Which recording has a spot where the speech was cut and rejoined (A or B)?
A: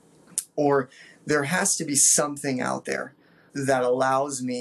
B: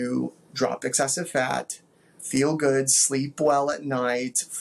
A